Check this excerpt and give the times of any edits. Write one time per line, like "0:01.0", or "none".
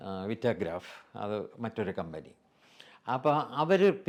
none